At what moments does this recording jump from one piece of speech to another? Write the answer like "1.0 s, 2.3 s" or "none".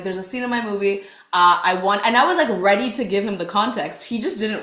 none